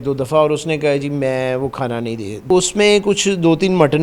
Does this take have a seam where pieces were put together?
yes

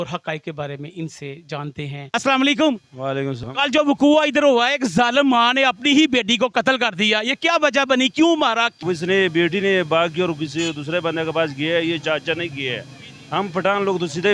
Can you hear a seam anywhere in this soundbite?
yes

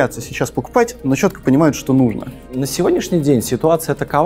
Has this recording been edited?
yes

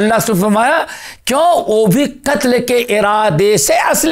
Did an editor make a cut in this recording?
no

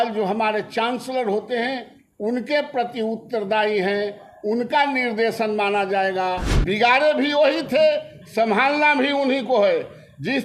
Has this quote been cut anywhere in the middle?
yes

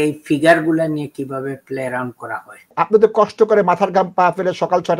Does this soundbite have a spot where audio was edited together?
yes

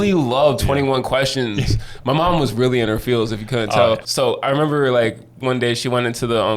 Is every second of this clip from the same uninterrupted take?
no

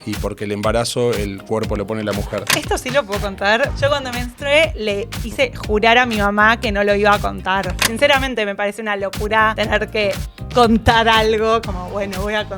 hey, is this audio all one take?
no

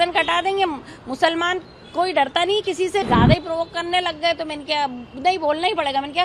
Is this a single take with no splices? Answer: no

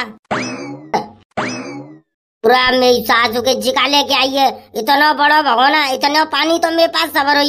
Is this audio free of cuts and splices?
no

